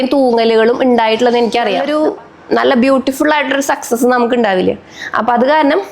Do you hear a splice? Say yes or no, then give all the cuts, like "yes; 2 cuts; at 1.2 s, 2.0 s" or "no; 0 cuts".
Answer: yes; 1 cut; at 1.8 s